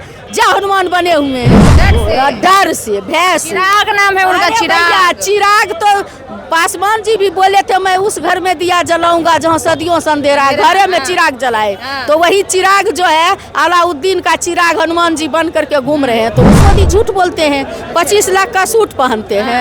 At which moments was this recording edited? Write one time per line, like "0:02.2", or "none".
0:16.6